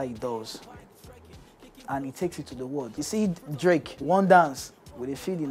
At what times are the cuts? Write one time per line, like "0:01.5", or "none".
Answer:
0:02.9
0:03.9